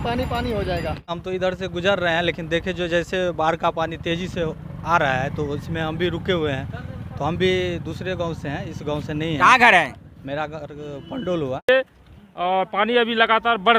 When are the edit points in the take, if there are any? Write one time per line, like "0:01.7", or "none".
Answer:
0:01.2
0:11.7